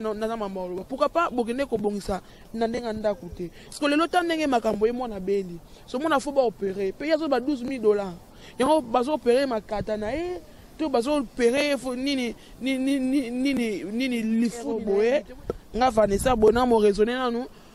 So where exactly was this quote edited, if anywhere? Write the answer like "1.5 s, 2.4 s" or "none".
14.8 s